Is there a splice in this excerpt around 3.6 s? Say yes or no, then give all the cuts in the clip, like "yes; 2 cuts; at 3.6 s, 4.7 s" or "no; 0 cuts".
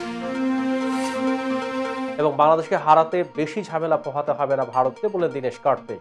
no; 1 cut; at 2.1 s